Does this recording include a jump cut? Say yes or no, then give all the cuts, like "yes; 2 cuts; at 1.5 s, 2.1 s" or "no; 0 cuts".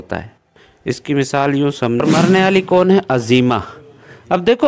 yes; 1 cut; at 2.0 s